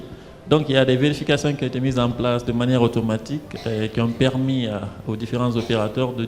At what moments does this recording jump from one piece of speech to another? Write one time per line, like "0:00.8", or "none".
none